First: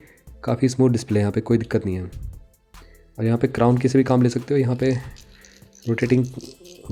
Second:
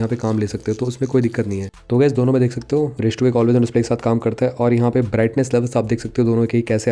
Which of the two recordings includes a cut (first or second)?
second